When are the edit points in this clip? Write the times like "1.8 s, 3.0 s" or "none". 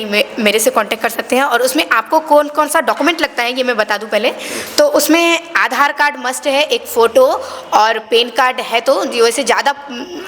none